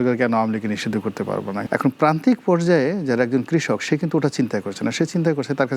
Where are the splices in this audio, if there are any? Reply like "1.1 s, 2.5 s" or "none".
1.6 s